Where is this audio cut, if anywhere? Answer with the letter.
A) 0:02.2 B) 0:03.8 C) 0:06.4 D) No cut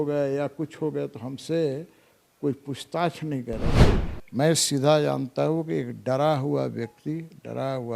B